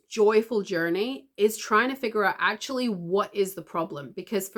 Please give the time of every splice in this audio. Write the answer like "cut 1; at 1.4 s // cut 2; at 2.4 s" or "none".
none